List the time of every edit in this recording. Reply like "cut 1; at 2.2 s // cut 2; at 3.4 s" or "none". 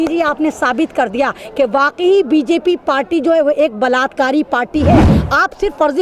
cut 1; at 5.1 s